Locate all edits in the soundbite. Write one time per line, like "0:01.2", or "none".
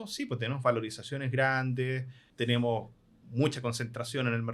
0:02.2

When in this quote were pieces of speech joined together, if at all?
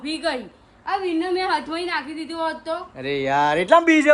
0:02.9

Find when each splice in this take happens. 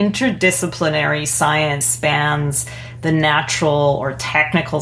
0:01.9

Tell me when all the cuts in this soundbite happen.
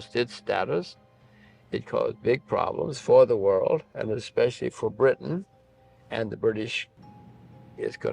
0:07.1

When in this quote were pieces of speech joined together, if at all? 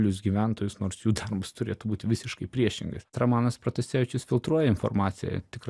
0:03.2

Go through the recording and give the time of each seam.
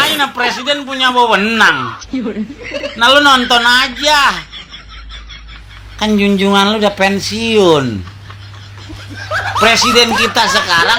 none

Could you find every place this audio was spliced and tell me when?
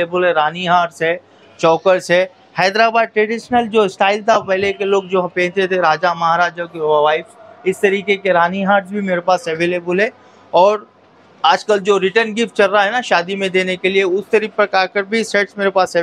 none

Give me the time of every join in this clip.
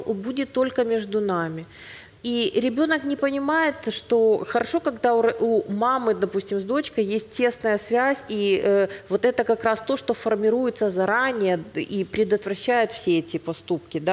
none

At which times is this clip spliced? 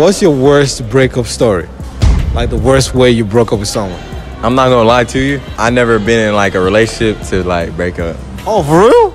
0:05.5
0:08.4

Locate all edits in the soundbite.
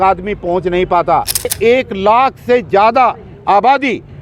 0:01.5

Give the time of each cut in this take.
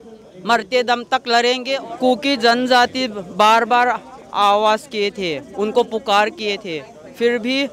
0:01.7

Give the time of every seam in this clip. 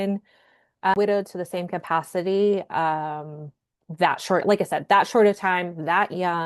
0:00.9

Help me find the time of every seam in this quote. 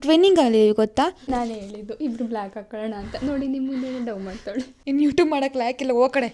0:01.2
0:04.7

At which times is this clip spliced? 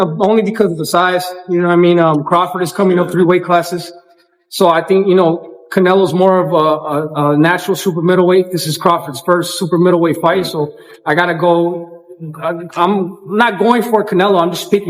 none

